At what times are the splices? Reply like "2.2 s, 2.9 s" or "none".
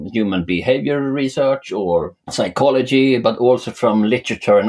2.2 s